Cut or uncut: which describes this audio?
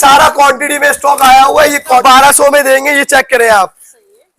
cut